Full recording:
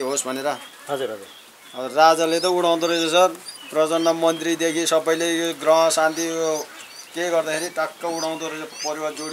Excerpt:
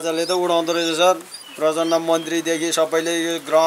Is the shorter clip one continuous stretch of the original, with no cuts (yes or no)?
yes